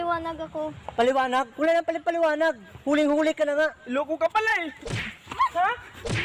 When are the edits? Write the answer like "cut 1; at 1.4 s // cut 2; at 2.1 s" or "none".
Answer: none